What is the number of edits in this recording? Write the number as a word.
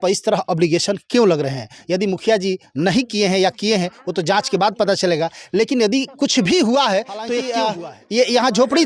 one